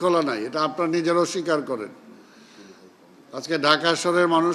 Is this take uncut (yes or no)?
yes